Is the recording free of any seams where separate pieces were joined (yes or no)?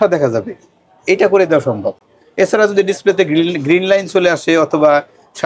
yes